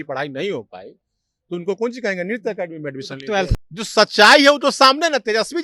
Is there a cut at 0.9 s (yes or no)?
no